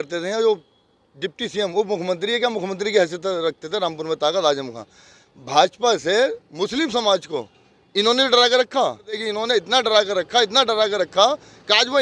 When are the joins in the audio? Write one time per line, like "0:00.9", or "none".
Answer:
0:09.3